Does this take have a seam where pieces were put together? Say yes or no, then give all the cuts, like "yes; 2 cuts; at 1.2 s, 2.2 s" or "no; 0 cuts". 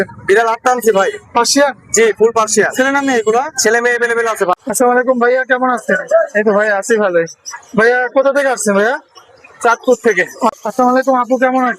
yes; 2 cuts; at 4.6 s, 10.5 s